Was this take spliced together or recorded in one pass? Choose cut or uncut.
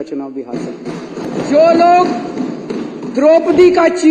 cut